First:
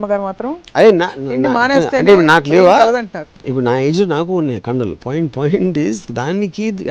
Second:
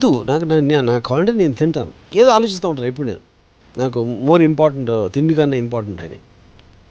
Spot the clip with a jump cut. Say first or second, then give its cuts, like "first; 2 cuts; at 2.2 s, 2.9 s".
second; 1 cut; at 1.9 s